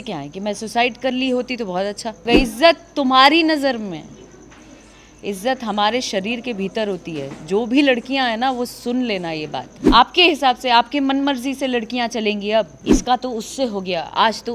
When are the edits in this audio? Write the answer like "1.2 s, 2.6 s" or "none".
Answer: 2.2 s, 9.7 s, 12.8 s